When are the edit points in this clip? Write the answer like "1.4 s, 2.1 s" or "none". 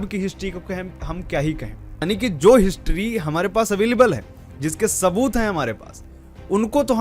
2.0 s